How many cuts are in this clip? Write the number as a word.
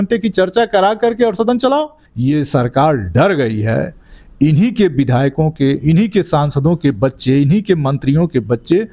one